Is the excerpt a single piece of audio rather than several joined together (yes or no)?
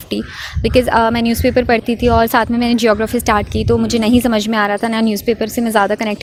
yes